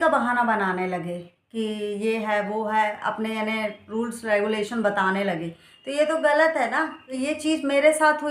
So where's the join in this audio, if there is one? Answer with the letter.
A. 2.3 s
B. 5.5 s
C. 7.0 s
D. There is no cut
C